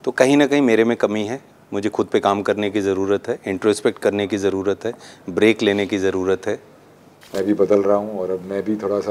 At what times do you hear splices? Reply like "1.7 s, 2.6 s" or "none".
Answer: 7.3 s